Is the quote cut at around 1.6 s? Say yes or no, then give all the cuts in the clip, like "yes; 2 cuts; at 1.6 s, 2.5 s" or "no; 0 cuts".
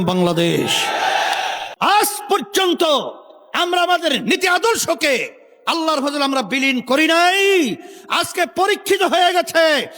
yes; 1 cut; at 1.6 s